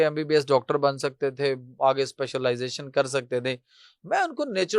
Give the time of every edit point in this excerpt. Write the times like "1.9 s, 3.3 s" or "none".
none